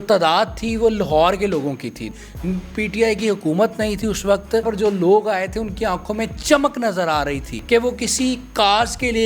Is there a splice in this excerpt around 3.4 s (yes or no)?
no